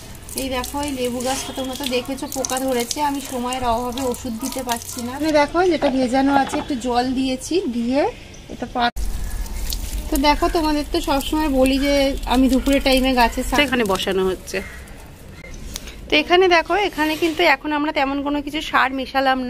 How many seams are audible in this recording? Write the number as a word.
three